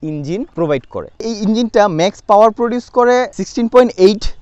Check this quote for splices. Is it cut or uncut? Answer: uncut